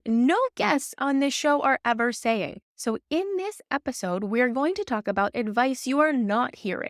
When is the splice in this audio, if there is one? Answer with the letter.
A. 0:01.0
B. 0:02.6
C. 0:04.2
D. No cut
B